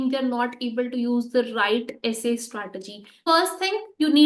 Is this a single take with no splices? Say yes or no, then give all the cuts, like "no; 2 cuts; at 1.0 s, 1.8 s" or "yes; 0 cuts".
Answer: no; 1 cut; at 3.2 s